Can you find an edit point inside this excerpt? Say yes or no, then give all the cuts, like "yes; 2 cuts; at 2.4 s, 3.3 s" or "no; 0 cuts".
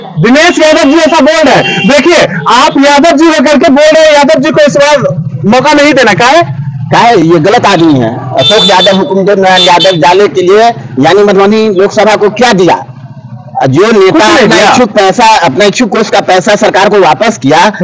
no; 0 cuts